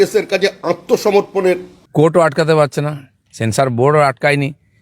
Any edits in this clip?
yes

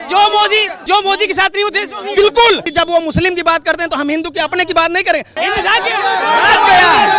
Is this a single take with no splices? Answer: no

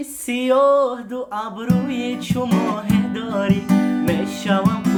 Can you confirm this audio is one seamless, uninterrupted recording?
yes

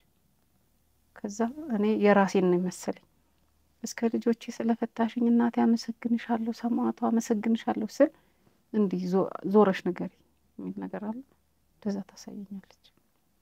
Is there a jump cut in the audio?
no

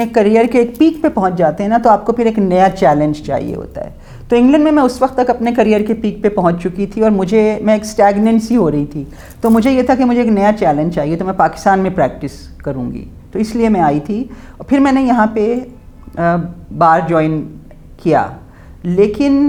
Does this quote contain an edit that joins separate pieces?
no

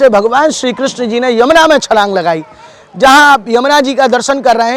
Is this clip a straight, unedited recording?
yes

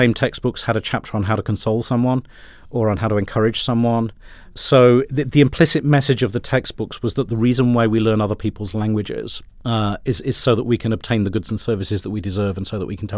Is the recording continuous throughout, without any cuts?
yes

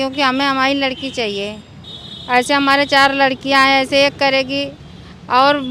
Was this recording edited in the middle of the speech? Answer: no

